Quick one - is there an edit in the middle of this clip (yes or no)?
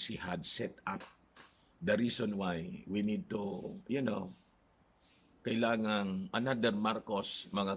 yes